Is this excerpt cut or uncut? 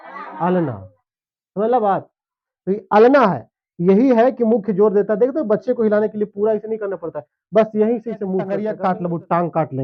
cut